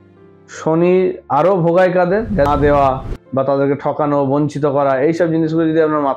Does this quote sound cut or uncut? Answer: cut